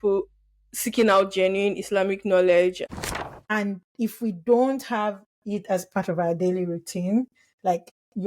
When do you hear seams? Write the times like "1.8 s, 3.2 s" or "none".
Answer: 2.8 s